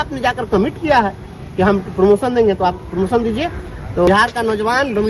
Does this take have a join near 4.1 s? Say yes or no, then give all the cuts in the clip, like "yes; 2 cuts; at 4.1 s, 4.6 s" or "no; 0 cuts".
yes; 1 cut; at 4.1 s